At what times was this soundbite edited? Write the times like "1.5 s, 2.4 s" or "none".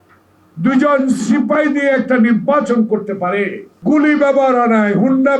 3.7 s